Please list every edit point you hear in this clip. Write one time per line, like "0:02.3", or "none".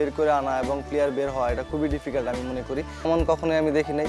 0:03.1